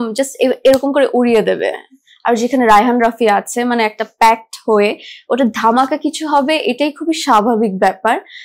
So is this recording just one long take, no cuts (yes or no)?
yes